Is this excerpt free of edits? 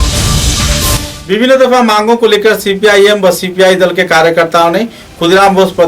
no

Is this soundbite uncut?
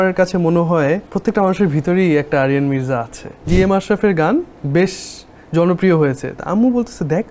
no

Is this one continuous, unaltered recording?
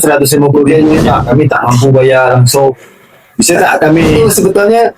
no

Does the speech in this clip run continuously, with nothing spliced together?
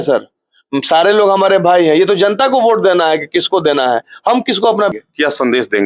no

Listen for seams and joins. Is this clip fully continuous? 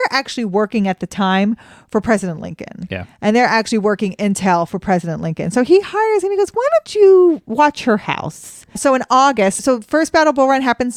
yes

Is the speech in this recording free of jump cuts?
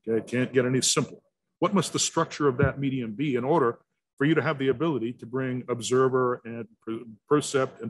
no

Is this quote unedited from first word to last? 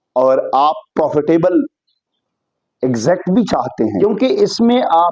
no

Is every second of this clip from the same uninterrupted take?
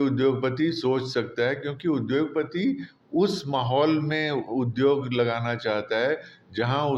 yes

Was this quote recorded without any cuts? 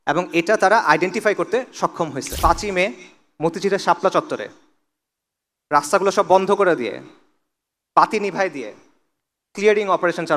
no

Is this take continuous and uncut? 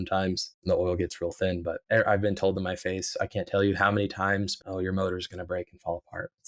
no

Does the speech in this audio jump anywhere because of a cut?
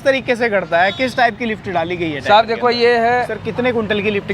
yes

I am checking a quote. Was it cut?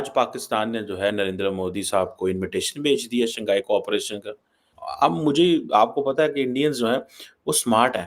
no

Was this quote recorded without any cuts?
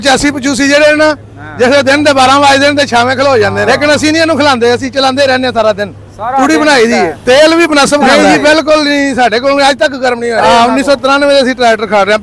no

